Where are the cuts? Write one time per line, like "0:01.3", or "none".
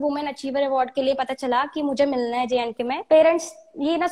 0:03.0

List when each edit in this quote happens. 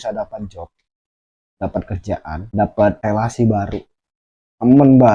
0:02.5
0:03.0

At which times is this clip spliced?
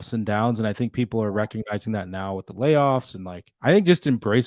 none

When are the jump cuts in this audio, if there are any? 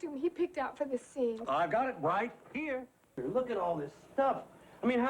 0:03.1

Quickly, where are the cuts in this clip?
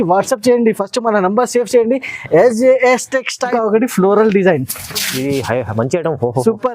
0:03.5

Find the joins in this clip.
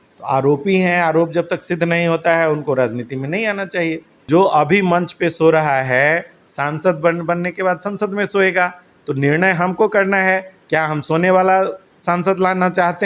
0:04.1

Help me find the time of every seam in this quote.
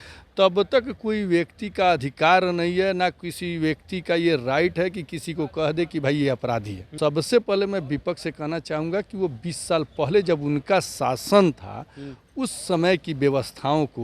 0:06.8

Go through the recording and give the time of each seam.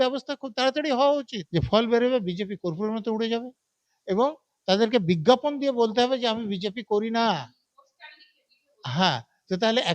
0:01.4

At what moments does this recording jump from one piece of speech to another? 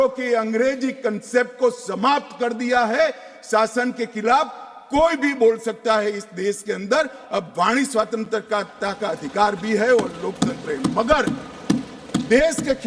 none

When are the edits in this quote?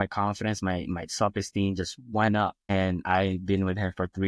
0:02.7

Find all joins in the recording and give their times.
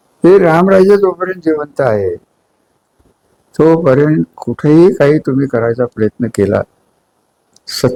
none

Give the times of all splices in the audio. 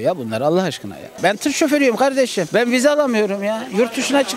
0:01.2

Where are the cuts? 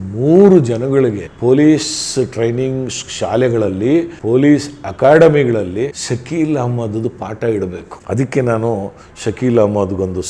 0:01.3
0:04.1
0:06.0

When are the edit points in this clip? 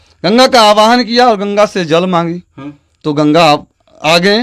none

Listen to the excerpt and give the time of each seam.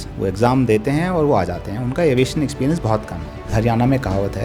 0:03.4

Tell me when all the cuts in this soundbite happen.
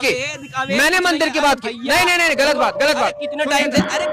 none

